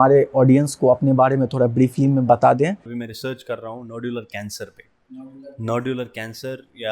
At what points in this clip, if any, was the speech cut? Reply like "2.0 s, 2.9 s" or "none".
2.9 s